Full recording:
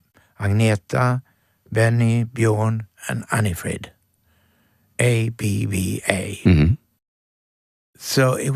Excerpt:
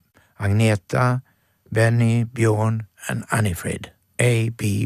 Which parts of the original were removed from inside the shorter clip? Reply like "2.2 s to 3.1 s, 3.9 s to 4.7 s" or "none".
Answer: 4.0 s to 4.8 s